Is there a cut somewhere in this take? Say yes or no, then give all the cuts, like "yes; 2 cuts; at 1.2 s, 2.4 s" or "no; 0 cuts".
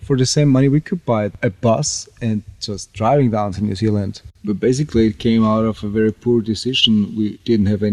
yes; 2 cuts; at 1.3 s, 4.3 s